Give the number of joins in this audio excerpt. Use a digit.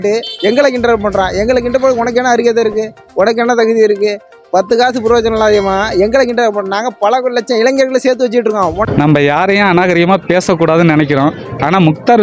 1